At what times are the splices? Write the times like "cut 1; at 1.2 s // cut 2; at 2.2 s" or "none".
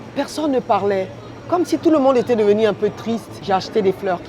cut 1; at 3.3 s